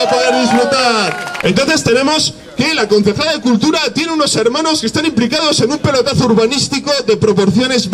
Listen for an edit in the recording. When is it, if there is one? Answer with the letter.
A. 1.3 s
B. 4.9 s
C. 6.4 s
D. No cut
A